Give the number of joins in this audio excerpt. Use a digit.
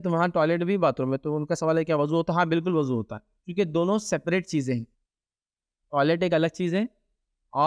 0